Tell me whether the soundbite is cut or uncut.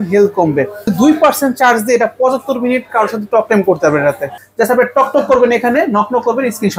cut